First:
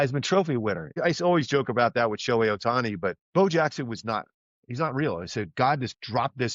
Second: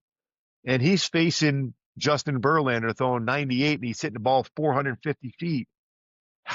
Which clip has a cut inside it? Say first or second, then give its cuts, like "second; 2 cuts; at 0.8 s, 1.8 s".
first; 2 cuts; at 1.0 s, 3.2 s